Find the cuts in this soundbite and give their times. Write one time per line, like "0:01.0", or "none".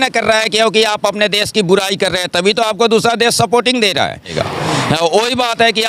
0:04.3

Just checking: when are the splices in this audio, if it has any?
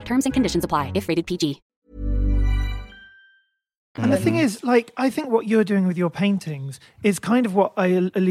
none

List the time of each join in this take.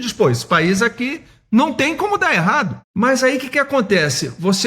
0:02.8

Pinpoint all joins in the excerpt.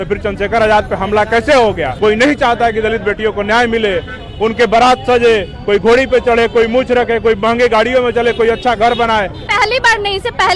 0:01.9
0:09.4

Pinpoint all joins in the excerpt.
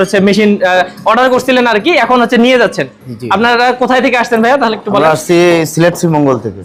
none

